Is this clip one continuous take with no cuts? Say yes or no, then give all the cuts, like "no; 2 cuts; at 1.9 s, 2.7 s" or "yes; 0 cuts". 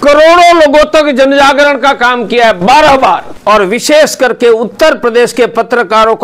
no; 1 cut; at 3.3 s